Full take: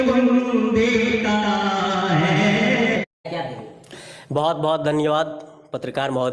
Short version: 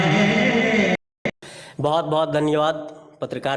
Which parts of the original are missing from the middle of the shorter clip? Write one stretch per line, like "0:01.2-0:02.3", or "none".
0:03.3-0:03.5